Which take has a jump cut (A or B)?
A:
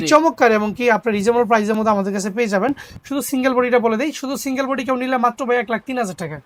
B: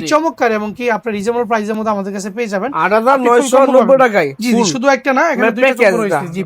B